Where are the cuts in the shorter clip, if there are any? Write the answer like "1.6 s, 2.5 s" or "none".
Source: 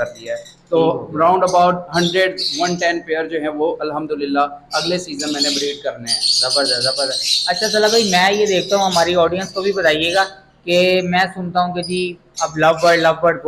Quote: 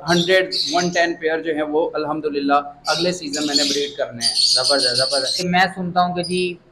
5.5 s